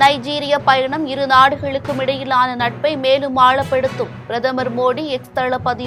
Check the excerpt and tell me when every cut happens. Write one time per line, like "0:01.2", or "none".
none